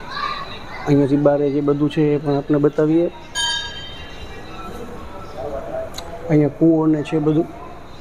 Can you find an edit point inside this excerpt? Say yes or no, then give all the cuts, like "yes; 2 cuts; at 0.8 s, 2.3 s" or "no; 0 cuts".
no; 0 cuts